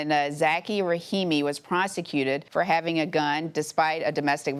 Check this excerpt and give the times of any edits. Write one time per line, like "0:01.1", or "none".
none